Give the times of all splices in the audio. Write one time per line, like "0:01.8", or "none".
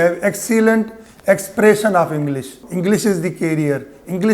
0:02.6